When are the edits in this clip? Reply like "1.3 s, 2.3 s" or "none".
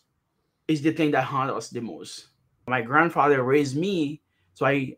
2.7 s